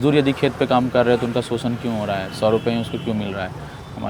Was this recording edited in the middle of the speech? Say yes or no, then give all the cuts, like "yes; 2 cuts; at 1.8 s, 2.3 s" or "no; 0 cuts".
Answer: no; 0 cuts